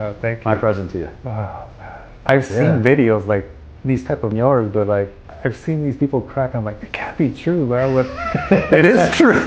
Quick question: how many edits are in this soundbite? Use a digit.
0